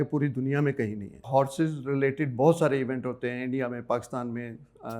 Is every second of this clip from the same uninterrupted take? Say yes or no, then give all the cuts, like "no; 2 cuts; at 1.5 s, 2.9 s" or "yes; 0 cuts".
no; 1 cut; at 1.3 s